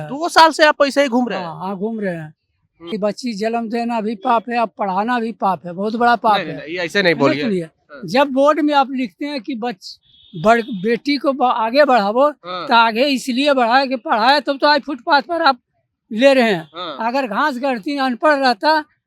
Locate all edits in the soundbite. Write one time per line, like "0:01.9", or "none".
0:02.9

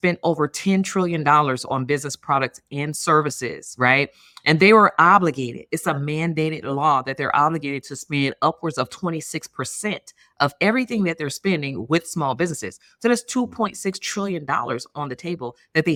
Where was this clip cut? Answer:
none

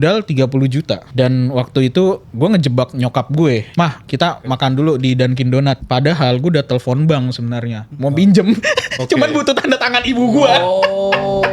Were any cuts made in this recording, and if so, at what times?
0:01.1
0:02.3
0:03.7
0:05.8

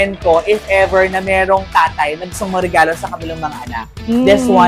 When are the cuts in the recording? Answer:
none

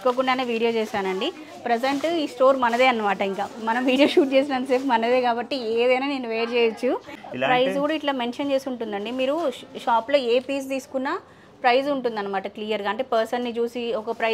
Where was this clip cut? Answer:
0:07.2

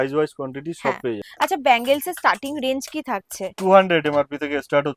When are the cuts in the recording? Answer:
0:01.2

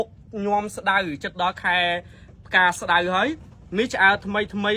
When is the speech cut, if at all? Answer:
none

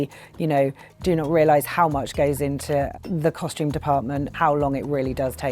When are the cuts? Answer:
0:04.3

